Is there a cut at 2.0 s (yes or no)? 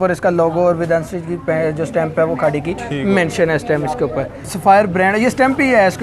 no